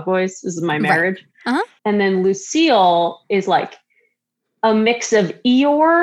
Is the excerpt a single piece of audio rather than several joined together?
yes; 0 cuts

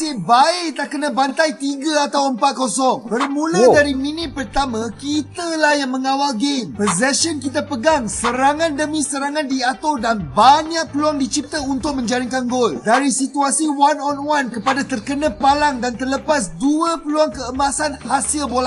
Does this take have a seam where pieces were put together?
no; 0 cuts

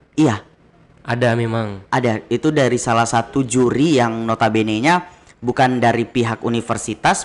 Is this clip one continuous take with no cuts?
yes; 0 cuts

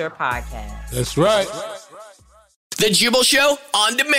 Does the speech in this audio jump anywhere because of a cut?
yes; 1 cut; at 2.7 s

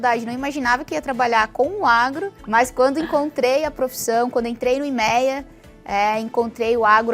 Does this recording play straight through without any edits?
no; 1 cut; at 2.4 s

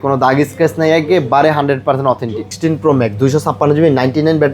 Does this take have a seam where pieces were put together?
yes; 1 cut; at 2.5 s

